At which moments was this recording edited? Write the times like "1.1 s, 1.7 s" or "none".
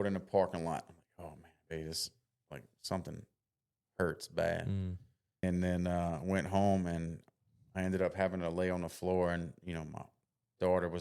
5.4 s